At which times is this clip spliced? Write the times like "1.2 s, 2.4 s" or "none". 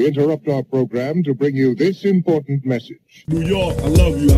none